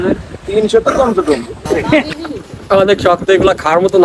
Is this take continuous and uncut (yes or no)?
no